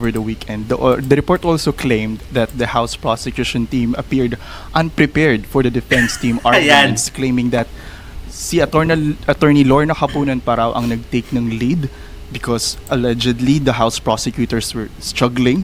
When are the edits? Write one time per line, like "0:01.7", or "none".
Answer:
none

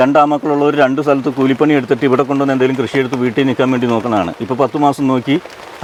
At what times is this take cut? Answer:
none

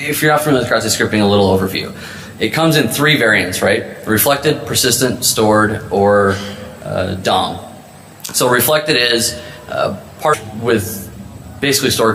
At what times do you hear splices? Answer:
none

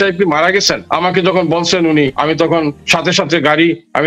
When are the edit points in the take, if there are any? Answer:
0:00.8
0:02.5

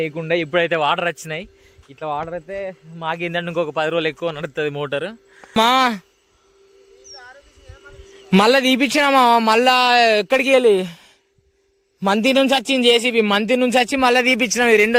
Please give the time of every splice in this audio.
0:05.6

